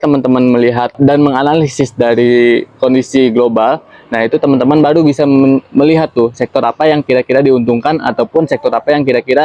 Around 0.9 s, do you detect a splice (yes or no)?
yes